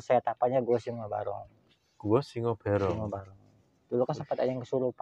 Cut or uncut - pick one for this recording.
uncut